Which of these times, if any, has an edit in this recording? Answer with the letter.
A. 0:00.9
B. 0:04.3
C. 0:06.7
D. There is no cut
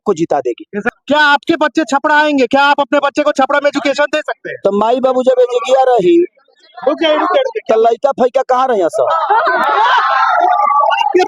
A